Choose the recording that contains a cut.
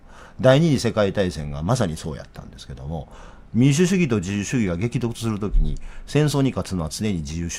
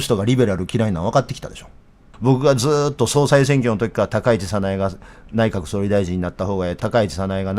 second; 2 cuts; at 2.0 s, 6.8 s

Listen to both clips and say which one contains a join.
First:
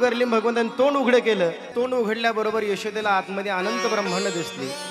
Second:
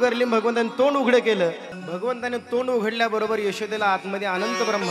first; 1 cut; at 1.7 s

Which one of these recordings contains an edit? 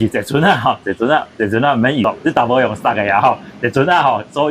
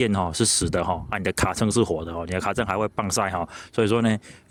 first; 1 cut; at 2.0 s

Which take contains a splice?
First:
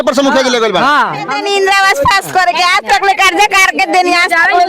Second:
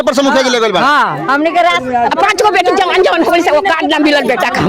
first; 1 cut; at 1.3 s

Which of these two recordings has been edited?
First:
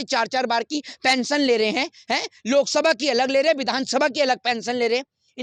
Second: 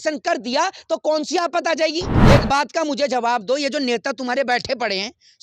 second; 1 cut; at 2.1 s

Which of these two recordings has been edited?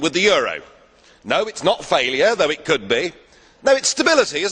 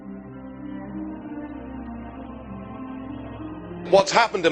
second; 1 cut; at 2.7 s

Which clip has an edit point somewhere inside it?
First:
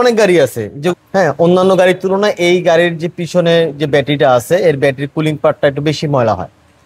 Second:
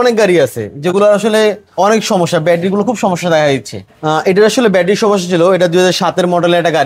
first; 1 cut; at 0.9 s

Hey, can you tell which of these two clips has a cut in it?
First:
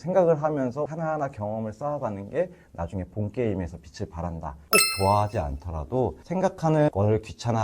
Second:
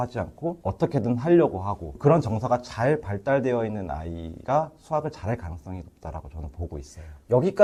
first; 2 cuts; at 4.5 s, 6.2 s

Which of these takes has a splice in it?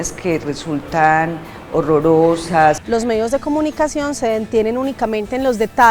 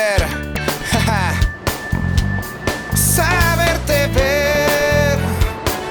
first; 1 cut; at 2.8 s

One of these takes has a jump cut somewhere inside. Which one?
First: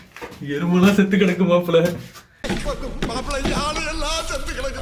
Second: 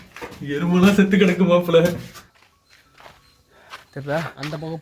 second; 1 cut; at 2.3 s

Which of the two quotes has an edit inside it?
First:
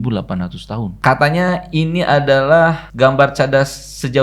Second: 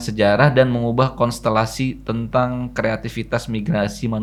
first; 2 cuts; at 0.9 s, 2.8 s

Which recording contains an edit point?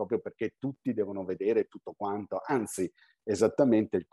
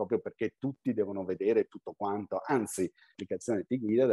second; 1 cut; at 3.2 s

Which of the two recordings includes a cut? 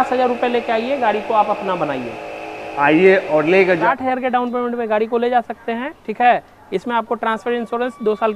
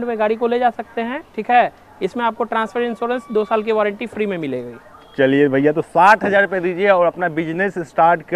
first; 1 cut; at 3.7 s

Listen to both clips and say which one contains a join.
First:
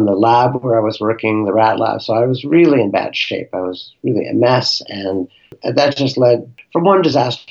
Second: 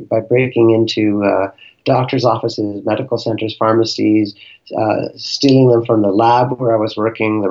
first; 2 cuts; at 5.6 s, 6.6 s

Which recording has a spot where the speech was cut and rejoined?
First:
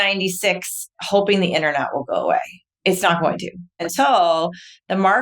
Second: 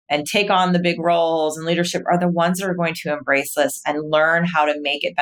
first; 2 cuts; at 2.6 s, 3.7 s

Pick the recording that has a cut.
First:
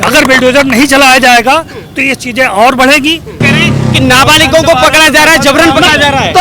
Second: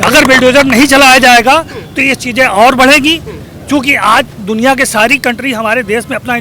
first; 1 cut; at 3.4 s

